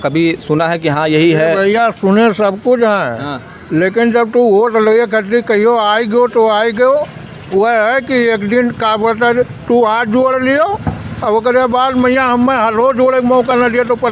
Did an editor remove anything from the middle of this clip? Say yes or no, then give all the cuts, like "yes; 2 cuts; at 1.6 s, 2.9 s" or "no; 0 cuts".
no; 0 cuts